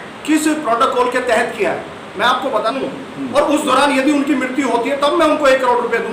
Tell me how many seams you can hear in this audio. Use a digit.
1